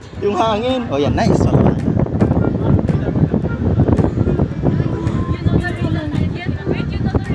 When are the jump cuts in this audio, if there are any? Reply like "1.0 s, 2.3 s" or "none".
none